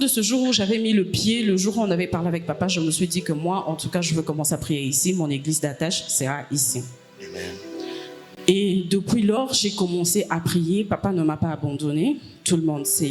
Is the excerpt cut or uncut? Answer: uncut